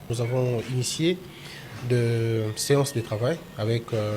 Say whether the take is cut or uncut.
uncut